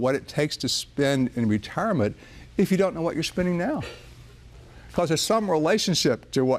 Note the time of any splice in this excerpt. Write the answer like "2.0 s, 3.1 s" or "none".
none